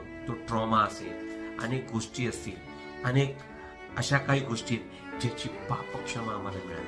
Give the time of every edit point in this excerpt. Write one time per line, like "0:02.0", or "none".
none

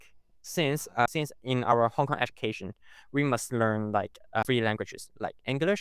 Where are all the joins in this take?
0:01.1
0:04.4

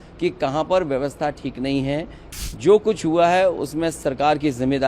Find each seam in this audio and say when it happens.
0:02.2

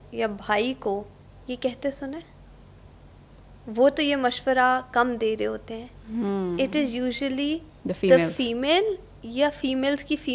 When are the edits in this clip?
none

